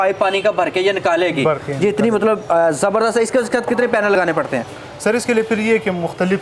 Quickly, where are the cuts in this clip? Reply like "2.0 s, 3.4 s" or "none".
none